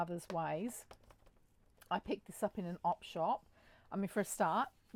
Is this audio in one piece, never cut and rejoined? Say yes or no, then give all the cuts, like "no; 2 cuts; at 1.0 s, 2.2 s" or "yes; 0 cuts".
yes; 0 cuts